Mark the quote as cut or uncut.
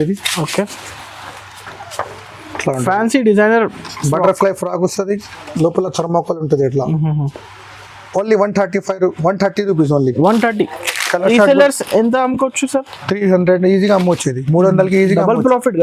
uncut